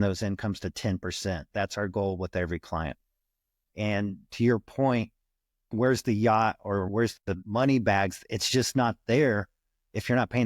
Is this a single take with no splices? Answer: no; 2 cuts; at 5.7 s, 6.9 s

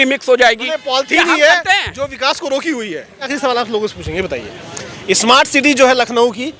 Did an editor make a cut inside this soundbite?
yes; 1 cut; at 3.3 s

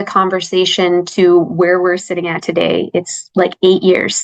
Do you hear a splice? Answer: no; 0 cuts

